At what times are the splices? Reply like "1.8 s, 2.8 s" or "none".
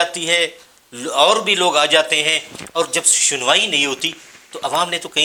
none